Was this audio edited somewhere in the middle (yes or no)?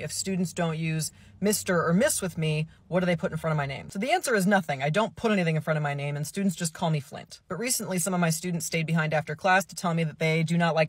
no